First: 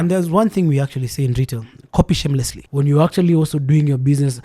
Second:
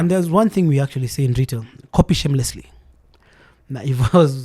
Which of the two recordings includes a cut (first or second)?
first